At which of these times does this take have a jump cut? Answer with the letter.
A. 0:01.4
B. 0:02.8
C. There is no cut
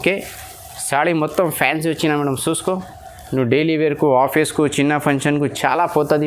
C